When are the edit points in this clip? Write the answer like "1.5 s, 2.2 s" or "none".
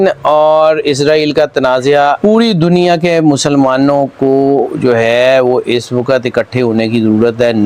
2.2 s